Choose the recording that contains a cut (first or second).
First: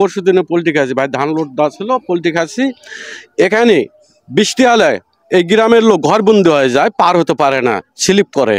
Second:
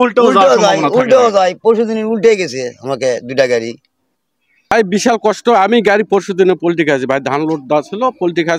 second